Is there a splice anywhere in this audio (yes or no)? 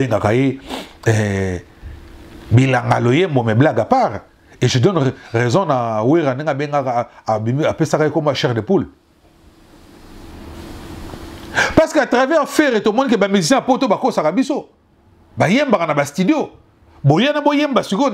no